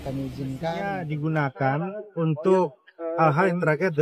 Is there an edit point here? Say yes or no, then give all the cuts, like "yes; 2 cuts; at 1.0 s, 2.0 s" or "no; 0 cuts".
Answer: yes; 1 cut; at 1.0 s